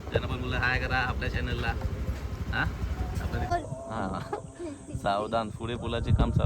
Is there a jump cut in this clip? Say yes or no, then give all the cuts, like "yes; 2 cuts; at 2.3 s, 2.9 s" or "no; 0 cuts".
yes; 1 cut; at 3.5 s